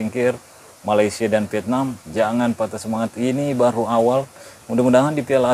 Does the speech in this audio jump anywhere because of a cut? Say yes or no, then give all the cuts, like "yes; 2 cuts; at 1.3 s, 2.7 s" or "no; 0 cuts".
yes; 1 cut; at 2.0 s